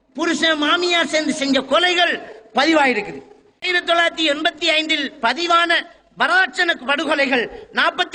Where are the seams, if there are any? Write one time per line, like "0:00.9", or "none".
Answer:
0:03.7